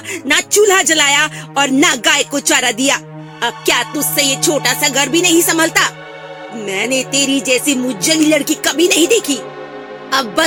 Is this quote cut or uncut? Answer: uncut